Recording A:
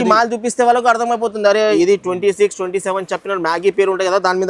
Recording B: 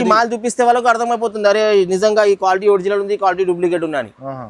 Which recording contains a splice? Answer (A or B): A